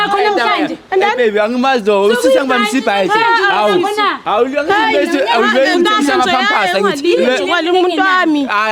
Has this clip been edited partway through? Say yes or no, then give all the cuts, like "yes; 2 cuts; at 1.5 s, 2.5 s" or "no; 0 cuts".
no; 0 cuts